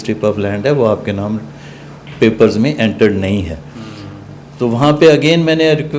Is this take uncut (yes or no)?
yes